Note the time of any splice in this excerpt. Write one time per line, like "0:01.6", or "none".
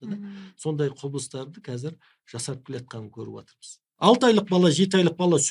0:03.8